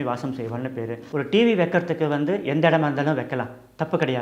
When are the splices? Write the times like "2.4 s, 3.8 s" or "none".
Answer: 1.0 s

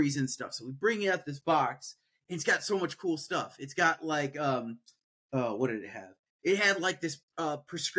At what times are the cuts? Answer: 1.1 s

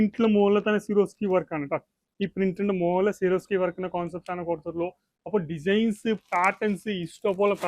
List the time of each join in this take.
none

